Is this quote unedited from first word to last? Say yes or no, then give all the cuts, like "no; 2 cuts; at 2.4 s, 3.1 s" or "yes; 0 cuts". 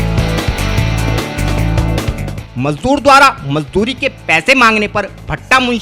no; 1 cut; at 2.4 s